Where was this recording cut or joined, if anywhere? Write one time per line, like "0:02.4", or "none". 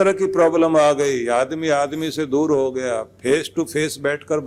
none